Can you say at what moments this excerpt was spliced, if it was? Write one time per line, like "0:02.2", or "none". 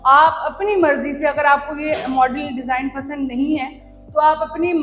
none